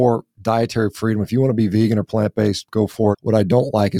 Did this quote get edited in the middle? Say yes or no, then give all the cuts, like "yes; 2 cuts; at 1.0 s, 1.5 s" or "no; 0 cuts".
yes; 1 cut; at 2.8 s